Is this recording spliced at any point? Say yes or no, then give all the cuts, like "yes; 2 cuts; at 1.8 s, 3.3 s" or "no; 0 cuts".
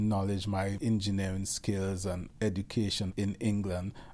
yes; 3 cuts; at 0.8 s, 2.2 s, 3.1 s